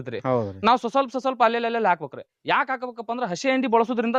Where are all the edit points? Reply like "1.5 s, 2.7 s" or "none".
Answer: none